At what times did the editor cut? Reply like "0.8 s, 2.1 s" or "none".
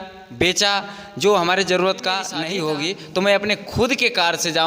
2.3 s